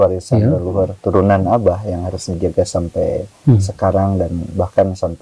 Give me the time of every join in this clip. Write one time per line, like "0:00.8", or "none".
none